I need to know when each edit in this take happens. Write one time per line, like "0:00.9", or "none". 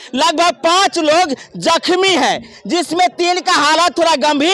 none

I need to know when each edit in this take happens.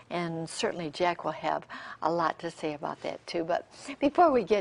0:01.9

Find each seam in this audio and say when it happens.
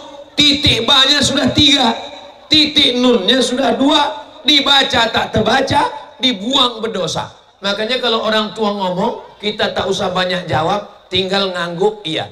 none

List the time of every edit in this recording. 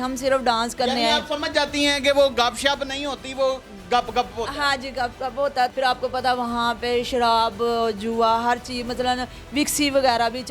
0:05.7

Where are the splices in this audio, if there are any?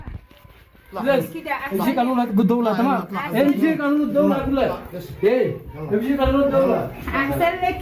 none

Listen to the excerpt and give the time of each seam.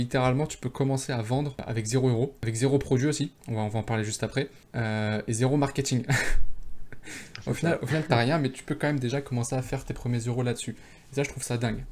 0:01.6
0:02.4
0:03.4
0:04.6

